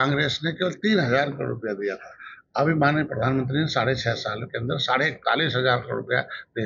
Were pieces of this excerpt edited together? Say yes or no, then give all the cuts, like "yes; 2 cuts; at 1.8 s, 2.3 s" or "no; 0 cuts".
no; 0 cuts